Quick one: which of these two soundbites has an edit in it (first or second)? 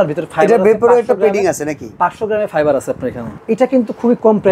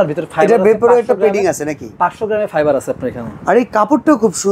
first